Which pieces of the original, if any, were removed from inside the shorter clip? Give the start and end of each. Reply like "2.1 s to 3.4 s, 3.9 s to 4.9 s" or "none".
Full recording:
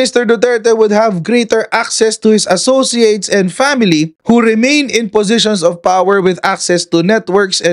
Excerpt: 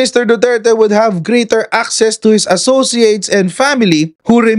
none

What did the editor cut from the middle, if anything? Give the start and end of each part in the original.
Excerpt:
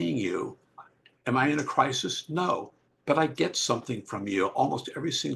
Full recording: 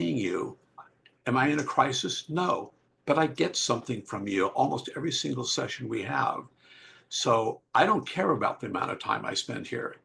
none

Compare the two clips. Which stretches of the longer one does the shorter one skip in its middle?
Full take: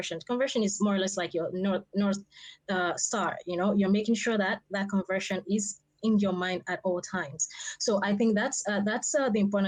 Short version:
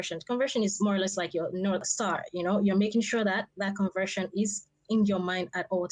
1.9 s to 3.0 s

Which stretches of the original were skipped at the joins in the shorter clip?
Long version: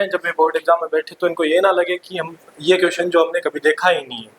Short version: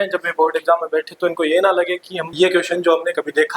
2.2 s to 2.4 s

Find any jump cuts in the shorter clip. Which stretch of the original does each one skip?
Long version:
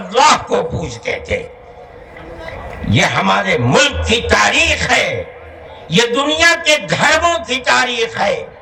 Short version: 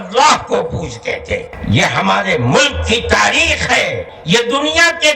1.5 s to 2.7 s, 5.3 s to 5.8 s

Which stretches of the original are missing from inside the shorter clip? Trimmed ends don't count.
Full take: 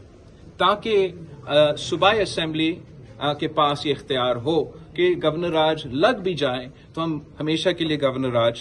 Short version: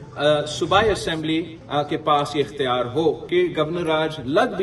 2.9 s to 3.1 s, 4.7 s to 4.9 s

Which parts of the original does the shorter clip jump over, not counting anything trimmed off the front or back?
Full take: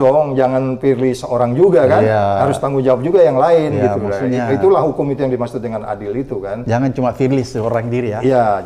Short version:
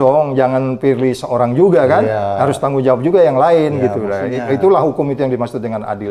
none

